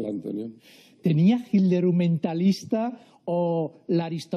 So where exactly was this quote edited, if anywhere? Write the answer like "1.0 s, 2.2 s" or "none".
3.1 s